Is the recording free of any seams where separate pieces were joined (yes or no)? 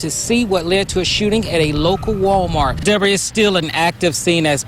no